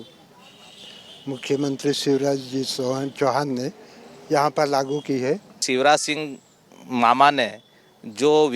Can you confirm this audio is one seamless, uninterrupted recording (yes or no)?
no